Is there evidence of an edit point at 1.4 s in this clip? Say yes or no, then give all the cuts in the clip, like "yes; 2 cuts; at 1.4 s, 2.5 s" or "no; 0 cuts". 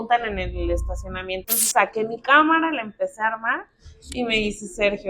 yes; 1 cut; at 1.4 s